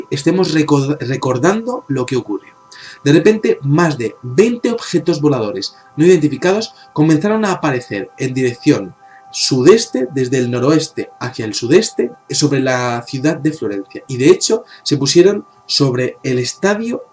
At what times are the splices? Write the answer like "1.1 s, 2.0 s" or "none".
none